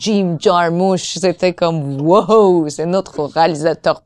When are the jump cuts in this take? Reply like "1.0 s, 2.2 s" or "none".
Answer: none